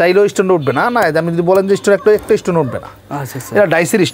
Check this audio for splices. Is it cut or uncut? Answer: uncut